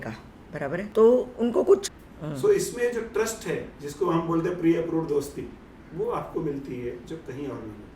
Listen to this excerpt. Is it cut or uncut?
cut